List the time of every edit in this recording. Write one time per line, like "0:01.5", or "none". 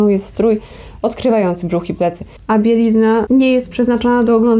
0:02.3
0:03.3